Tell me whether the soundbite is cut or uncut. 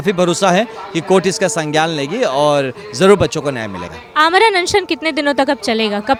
uncut